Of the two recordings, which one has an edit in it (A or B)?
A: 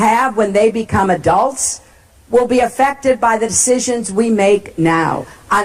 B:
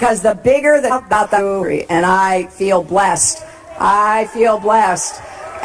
A